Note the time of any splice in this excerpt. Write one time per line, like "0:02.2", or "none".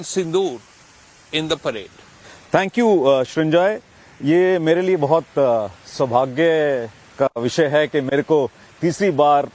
0:06.7